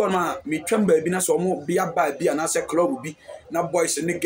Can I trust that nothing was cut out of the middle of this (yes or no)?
yes